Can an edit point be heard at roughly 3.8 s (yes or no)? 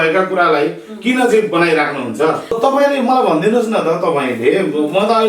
no